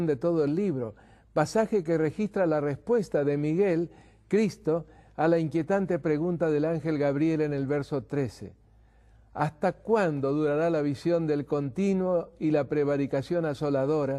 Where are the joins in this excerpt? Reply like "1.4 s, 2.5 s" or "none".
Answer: none

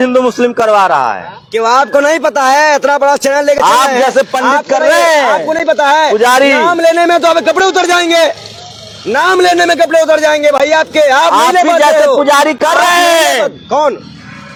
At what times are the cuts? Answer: none

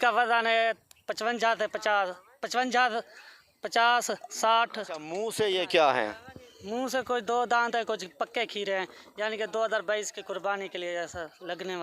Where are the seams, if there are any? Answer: 5.2 s

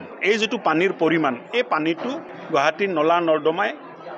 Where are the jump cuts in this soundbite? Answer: 2.3 s

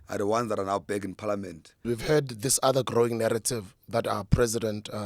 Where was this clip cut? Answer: 1.8 s

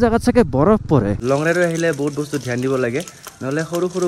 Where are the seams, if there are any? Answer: 1.2 s

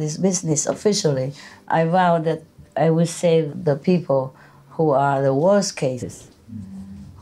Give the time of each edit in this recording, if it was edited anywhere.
3.5 s

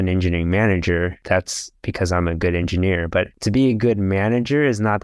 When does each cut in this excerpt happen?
none

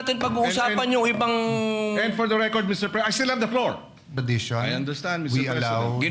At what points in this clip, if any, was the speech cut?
4.1 s

